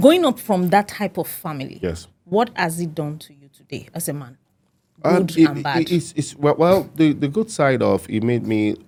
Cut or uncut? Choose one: uncut